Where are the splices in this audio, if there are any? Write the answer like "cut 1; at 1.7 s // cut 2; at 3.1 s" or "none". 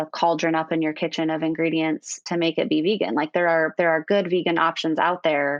none